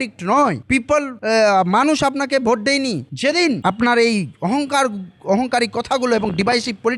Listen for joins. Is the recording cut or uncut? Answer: uncut